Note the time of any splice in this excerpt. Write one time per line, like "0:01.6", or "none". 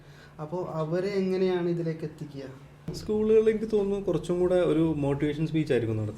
0:03.0